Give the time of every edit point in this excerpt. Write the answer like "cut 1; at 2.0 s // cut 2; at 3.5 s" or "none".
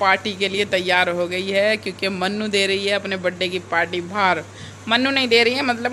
none

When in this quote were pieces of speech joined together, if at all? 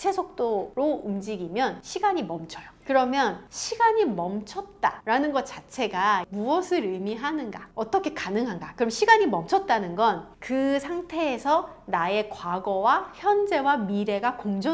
none

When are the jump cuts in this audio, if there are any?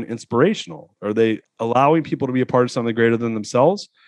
cut 1; at 1.0 s

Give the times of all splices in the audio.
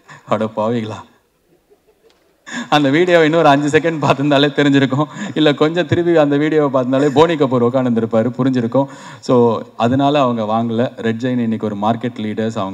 none

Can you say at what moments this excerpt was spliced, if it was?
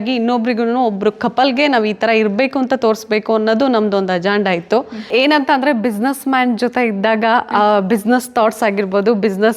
cut 1; at 5.1 s

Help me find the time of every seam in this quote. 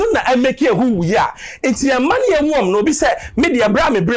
none

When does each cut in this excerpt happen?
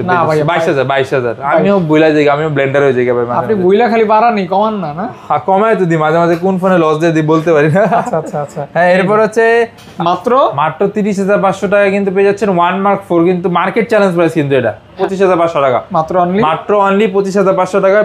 cut 1; at 9.8 s // cut 2; at 15.0 s

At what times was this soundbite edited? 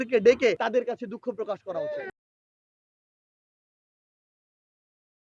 none

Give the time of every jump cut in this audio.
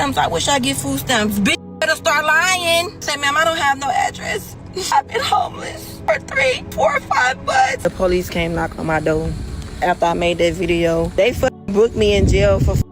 cut 1; at 3.1 s // cut 2; at 4.9 s // cut 3; at 5.9 s // cut 4; at 6.7 s // cut 5; at 7.8 s // cut 6; at 11.1 s

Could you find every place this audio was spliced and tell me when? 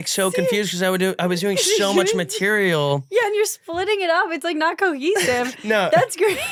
none

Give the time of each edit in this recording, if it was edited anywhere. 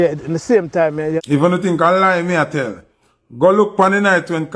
cut 1; at 1.2 s

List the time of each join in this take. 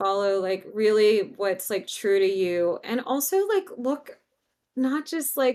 none

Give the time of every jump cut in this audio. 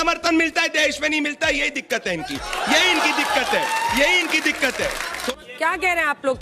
cut 1; at 5.3 s

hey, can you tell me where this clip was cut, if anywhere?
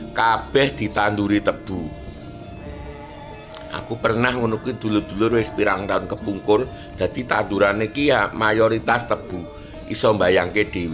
none

